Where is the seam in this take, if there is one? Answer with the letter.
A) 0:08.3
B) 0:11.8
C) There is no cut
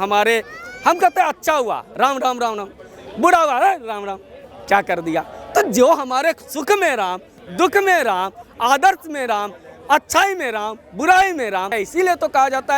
B